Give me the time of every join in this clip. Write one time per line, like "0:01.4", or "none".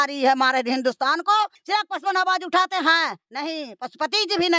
0:01.6